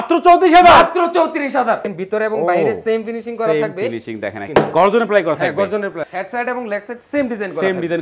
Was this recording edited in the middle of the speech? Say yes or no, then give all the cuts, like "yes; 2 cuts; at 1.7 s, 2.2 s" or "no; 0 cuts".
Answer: yes; 3 cuts; at 1.9 s, 4.4 s, 6.1 s